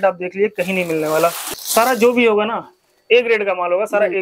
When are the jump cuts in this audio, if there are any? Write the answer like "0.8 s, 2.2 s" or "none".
1.4 s